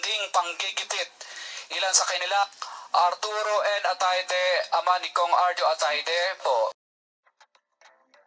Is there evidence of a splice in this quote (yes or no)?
yes